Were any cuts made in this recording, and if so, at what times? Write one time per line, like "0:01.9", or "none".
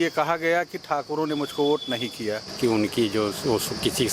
0:02.5